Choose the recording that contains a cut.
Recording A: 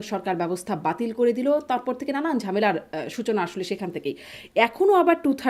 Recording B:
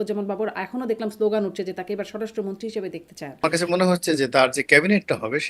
B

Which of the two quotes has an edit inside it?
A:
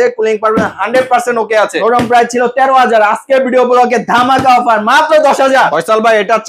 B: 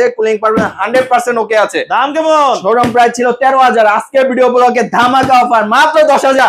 A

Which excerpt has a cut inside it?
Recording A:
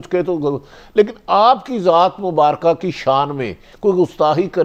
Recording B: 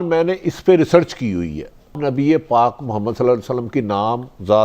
B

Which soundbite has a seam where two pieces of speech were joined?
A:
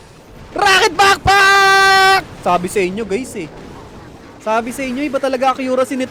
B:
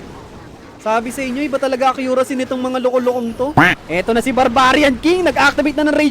B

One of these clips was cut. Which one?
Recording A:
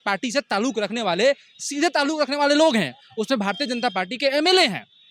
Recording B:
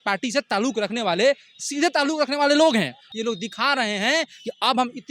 B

